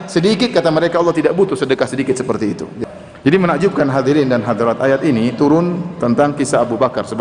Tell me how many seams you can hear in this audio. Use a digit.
1